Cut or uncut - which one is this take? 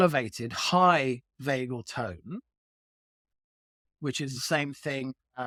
uncut